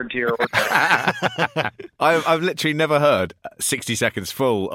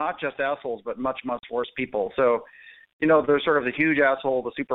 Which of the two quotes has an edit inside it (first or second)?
first